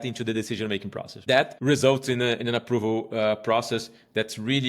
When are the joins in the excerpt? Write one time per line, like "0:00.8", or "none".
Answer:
0:01.3